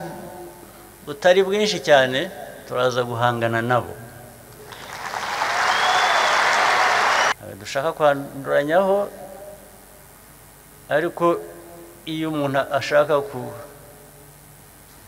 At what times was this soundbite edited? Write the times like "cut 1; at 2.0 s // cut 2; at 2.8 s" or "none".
cut 1; at 7.3 s // cut 2; at 10.2 s